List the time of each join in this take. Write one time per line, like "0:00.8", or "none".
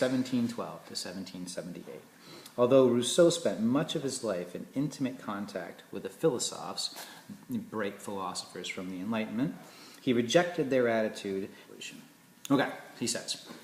none

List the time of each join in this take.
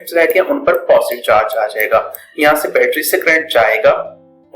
0:02.2

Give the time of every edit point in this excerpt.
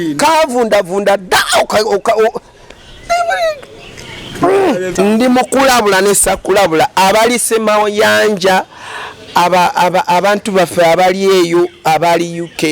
0:04.9

